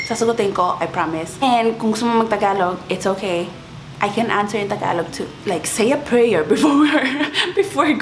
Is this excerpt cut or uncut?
cut